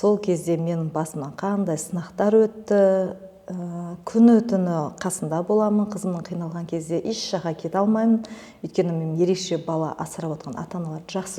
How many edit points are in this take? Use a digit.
0